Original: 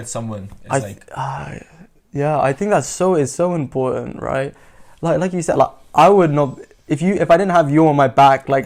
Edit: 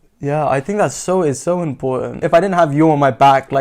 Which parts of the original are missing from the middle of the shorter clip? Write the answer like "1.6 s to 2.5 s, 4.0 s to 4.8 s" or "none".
4.1 s to 7.2 s